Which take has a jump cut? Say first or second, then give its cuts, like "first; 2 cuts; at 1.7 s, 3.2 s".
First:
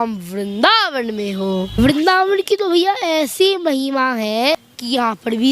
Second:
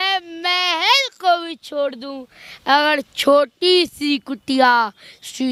first; 2 cuts; at 1.8 s, 4.5 s